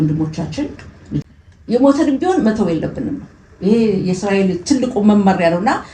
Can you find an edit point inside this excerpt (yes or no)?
yes